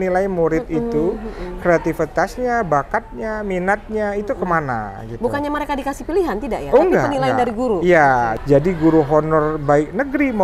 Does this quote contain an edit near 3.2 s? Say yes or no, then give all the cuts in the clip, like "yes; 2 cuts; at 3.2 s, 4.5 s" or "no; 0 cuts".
no; 1 cut; at 8.4 s